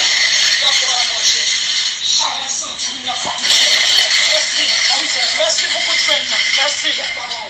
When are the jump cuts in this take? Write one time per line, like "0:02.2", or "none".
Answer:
none